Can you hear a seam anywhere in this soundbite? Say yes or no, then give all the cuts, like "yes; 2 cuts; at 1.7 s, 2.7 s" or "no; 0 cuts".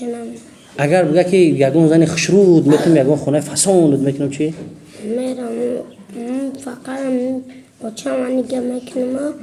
no; 0 cuts